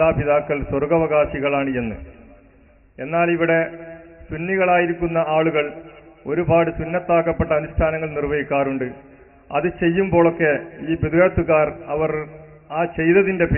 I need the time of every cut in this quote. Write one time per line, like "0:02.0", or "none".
none